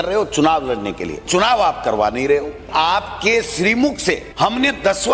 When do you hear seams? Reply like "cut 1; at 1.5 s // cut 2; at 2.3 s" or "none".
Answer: cut 1; at 1.2 s // cut 2; at 2.7 s // cut 3; at 4.3 s